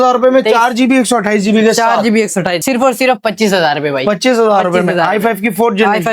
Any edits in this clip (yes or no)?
yes